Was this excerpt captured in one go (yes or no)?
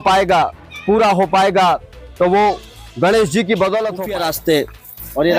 no